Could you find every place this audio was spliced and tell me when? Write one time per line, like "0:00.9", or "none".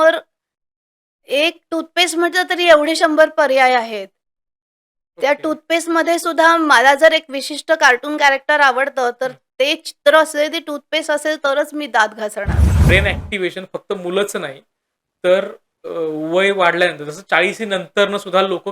0:12.8

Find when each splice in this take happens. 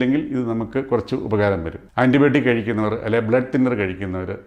0:01.8

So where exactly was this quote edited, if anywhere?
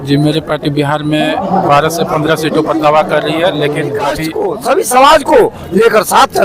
0:04.3

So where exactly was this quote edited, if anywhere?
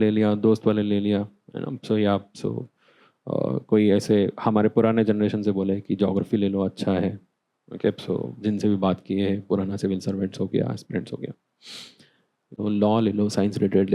0:12.6

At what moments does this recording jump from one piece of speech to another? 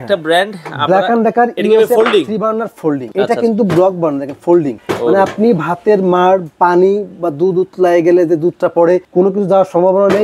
none

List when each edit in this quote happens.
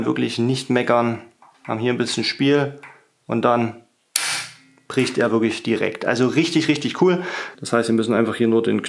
0:07.5

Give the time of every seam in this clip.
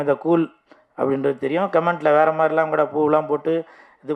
none

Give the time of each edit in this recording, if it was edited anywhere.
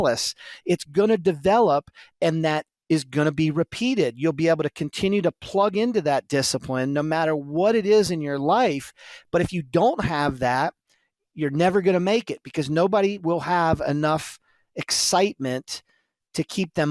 none

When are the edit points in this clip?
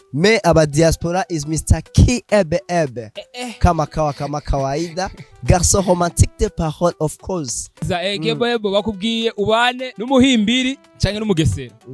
0:07.8
0:09.9
0:10.9

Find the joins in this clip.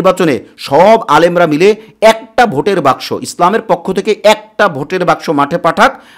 none

